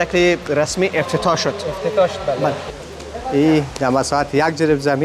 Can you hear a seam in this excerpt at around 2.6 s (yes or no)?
yes